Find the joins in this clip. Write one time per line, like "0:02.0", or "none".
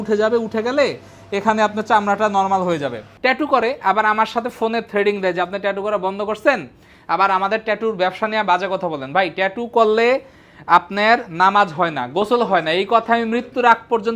0:03.1